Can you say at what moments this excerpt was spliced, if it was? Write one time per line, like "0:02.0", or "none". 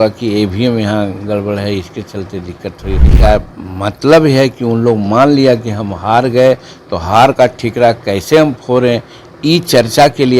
0:03.1